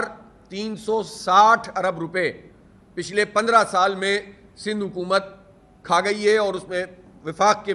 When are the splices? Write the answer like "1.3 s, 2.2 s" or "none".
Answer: none